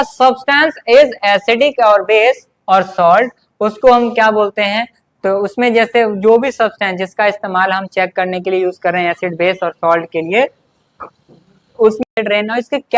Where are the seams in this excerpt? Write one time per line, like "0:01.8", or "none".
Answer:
0:12.0